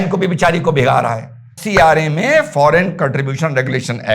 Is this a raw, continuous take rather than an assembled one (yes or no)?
no